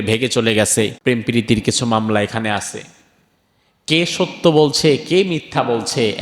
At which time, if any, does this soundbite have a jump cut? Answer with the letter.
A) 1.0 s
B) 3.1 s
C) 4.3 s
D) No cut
A